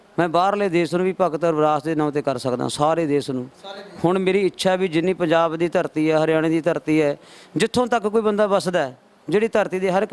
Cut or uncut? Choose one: uncut